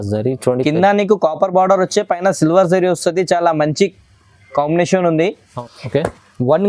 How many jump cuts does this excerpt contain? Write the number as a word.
one